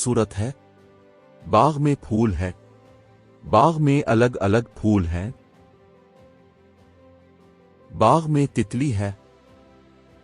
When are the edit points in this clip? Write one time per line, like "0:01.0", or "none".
0:05.3
0:07.4